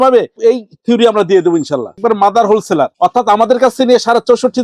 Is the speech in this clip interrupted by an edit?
yes; 1 cut; at 1.9 s

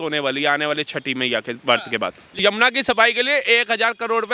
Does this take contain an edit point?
yes; 1 cut; at 2.4 s

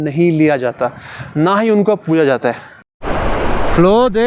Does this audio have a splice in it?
yes; 1 cut; at 2.7 s

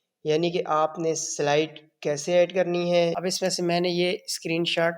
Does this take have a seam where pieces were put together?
yes; 1 cut; at 3.2 s

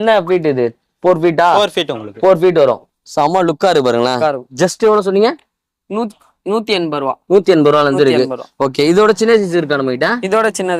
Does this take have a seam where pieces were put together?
yes; 1 cut; at 2.9 s

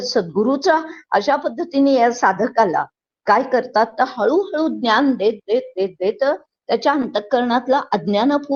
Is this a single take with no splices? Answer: yes; 0 cuts

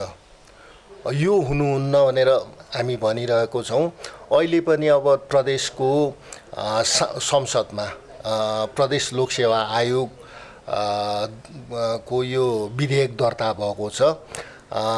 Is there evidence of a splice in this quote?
no; 0 cuts

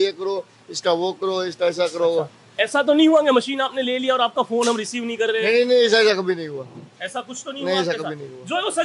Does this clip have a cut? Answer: no; 0 cuts

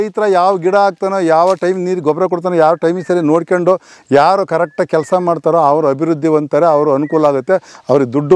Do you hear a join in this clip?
no; 0 cuts

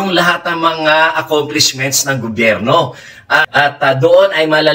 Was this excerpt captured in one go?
no; 1 cut; at 3.5 s

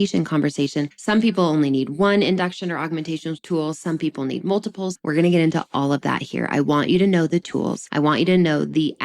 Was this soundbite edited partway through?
yes; 2 cuts; at 0.9 s, 5.0 s

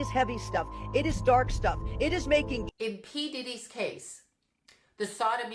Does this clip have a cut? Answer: yes; 1 cut; at 2.7 s

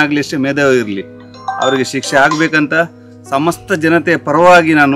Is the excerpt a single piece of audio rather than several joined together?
yes; 0 cuts

